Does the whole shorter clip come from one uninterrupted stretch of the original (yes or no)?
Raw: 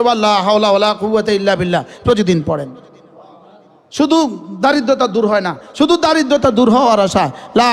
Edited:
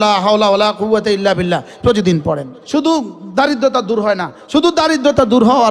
no